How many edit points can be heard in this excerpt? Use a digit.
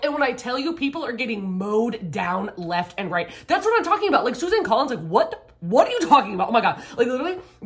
0